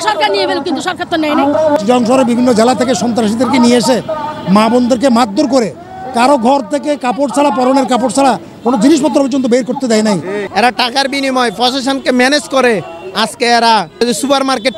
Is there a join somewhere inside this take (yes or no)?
yes